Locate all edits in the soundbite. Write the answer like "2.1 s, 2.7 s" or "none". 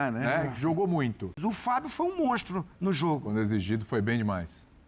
1.4 s